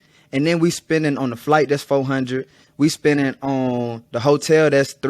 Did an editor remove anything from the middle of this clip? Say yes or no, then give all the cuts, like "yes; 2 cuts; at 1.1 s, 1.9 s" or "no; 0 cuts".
no; 0 cuts